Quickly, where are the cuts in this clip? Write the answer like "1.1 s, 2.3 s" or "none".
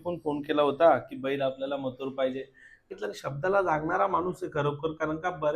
2.9 s